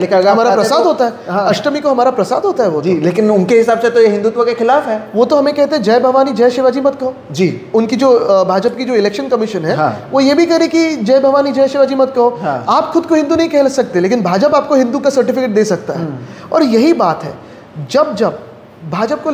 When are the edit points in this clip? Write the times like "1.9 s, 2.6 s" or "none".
none